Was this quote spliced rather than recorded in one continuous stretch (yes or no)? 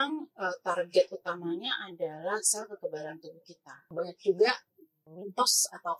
yes